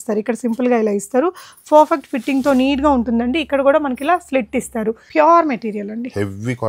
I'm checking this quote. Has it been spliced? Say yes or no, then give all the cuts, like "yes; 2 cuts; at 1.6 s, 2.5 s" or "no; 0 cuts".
yes; 1 cut; at 5.0 s